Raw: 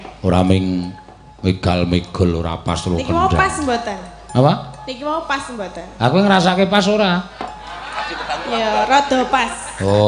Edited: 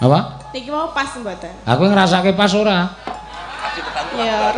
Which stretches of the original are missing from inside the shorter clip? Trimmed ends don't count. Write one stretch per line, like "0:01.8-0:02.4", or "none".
none